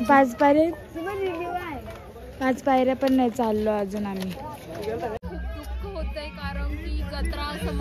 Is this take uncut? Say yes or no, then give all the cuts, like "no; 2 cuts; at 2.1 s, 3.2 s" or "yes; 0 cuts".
no; 1 cut; at 5.2 s